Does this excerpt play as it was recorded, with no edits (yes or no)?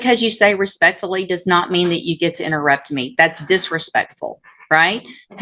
yes